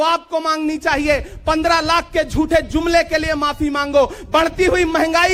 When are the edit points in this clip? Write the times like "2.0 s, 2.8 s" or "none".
none